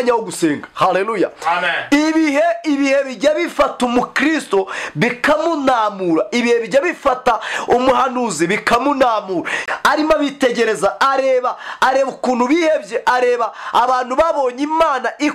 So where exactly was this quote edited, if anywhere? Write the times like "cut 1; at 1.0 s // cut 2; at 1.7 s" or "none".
cut 1; at 9.6 s